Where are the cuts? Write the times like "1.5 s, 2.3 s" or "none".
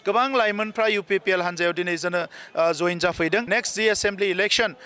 3.5 s